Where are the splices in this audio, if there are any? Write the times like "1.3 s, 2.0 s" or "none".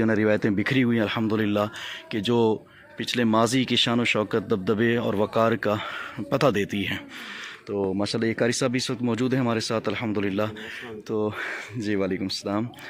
none